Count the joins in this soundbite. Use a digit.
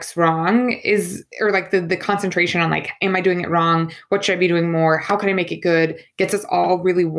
1